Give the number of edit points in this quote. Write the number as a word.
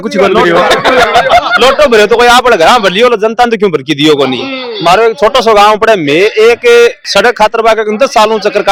zero